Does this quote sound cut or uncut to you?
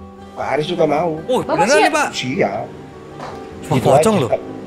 uncut